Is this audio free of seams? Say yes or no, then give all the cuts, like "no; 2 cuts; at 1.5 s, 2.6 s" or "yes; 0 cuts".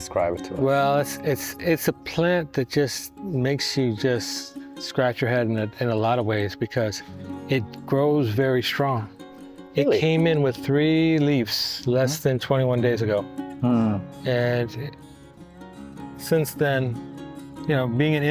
yes; 0 cuts